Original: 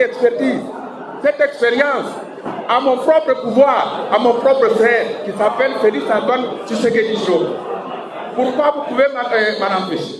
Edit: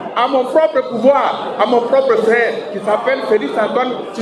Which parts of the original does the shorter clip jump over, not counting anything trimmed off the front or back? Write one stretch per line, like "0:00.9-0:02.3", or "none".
none